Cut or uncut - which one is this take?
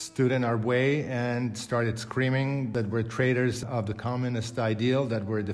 cut